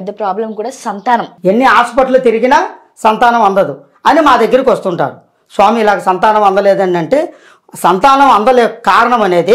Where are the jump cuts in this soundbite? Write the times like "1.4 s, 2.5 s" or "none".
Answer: 1.3 s